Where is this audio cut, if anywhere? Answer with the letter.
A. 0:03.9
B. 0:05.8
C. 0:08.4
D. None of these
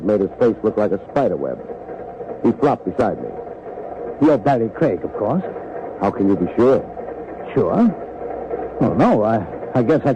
D